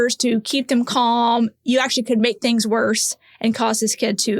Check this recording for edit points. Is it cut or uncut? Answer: uncut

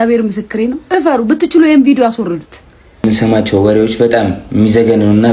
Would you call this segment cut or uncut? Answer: cut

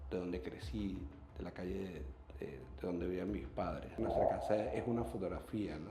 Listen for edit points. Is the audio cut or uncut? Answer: cut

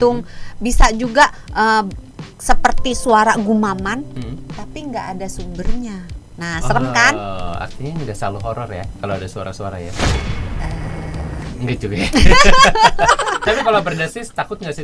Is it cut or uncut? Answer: uncut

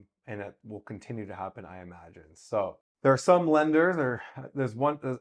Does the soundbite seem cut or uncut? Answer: cut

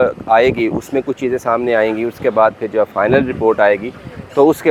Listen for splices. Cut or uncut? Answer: uncut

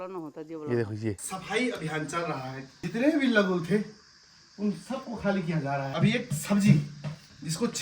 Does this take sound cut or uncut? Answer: cut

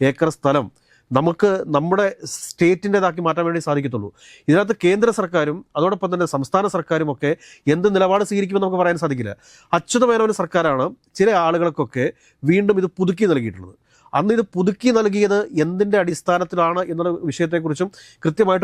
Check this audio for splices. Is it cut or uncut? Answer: uncut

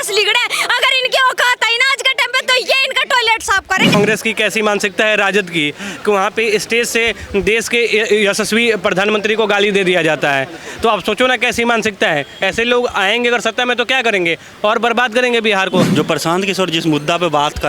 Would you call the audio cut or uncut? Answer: cut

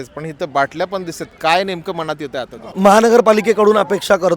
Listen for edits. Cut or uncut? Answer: cut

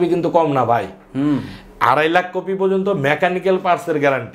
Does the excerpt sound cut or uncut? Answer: uncut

